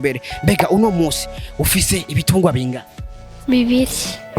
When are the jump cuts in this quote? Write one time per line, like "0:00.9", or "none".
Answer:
none